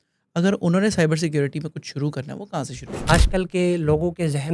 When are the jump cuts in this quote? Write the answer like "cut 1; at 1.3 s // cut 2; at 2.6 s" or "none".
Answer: cut 1; at 3.0 s